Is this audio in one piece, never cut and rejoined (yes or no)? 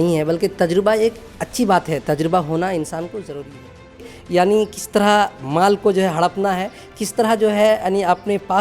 no